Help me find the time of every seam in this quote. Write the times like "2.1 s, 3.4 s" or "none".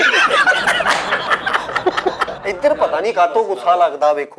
2.3 s